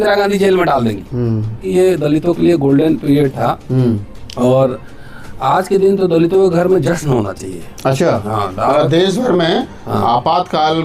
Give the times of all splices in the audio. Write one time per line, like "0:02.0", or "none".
0:01.6

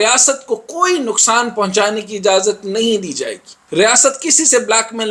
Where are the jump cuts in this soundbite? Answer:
none

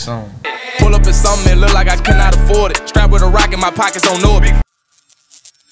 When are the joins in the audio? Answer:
0:04.6

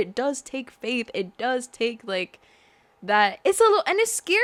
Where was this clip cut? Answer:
none

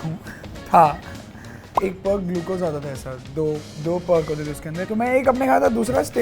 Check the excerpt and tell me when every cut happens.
0:01.8
0:04.8

